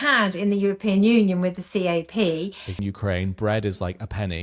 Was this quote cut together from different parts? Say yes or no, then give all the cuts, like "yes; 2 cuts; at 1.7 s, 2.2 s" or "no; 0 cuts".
yes; 1 cut; at 2.8 s